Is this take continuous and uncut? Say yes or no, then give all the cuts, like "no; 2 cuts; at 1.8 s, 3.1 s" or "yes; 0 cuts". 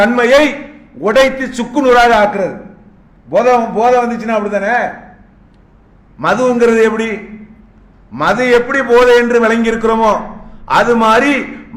yes; 0 cuts